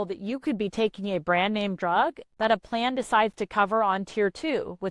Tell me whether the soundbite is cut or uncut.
uncut